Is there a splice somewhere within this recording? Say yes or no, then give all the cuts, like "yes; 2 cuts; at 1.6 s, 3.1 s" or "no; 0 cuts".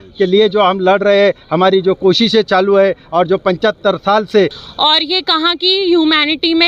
yes; 1 cut; at 4.6 s